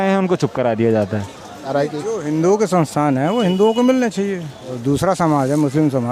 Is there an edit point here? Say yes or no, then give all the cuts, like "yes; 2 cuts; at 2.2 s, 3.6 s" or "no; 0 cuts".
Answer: yes; 2 cuts; at 1.7 s, 4.7 s